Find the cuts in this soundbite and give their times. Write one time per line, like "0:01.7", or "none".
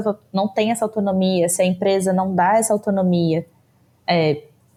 none